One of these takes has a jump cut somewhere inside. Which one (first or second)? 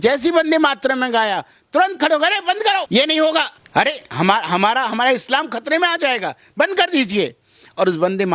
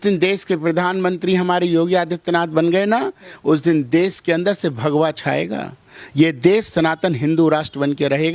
first